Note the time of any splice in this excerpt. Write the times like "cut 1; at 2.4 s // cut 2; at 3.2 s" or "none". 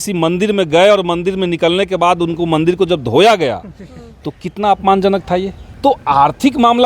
cut 1; at 5.6 s